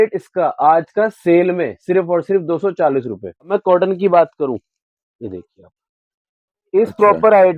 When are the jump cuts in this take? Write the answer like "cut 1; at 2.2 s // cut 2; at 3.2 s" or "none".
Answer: cut 1; at 3.5 s